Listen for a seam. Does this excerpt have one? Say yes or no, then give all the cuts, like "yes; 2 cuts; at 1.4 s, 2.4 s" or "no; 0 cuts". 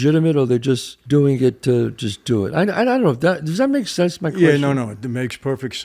yes; 1 cut; at 0.9 s